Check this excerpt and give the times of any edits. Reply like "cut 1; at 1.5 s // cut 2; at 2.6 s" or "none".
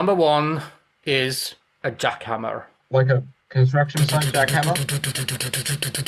none